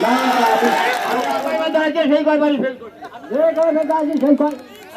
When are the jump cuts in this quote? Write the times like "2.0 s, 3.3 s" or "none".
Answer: 1.3 s